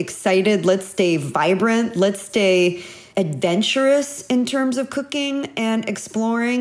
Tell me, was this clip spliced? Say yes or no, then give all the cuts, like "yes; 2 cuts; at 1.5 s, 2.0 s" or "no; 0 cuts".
yes; 1 cut; at 3.0 s